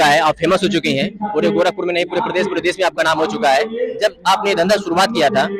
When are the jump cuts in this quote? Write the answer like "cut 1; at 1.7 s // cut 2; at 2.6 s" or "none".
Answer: none